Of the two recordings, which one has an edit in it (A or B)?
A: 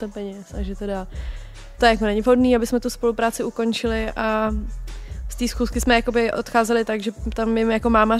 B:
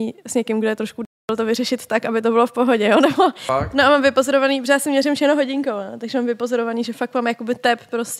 B